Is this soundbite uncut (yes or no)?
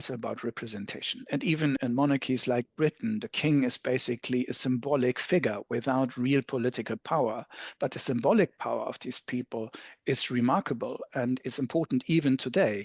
no